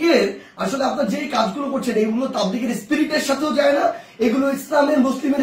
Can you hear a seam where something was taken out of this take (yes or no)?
no